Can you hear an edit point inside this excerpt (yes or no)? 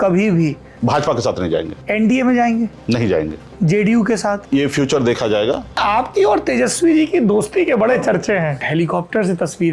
yes